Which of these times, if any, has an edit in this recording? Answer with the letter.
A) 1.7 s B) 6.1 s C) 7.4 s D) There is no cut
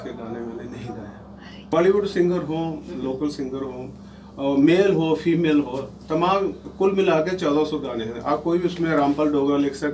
A